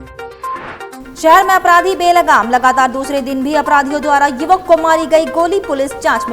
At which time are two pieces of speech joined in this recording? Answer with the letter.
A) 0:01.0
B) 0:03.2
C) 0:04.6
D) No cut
A